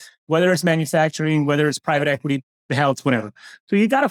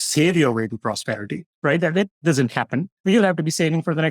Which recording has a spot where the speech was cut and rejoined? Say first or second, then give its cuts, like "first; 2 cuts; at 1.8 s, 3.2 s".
second; 1 cut; at 2.9 s